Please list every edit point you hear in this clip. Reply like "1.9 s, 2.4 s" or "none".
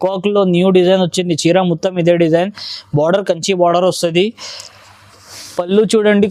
none